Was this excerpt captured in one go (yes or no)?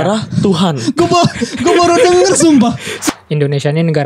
no